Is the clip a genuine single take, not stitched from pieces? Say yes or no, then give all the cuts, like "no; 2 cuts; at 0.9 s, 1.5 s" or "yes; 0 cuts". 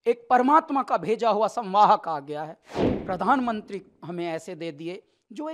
no; 1 cut; at 2.7 s